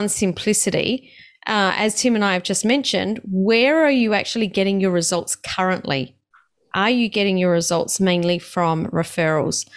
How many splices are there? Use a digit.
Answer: 0